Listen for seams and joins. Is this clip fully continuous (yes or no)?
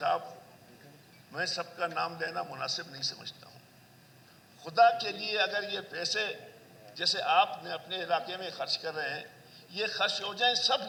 yes